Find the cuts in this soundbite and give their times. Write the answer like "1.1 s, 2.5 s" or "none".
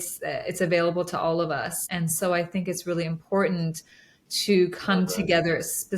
1.8 s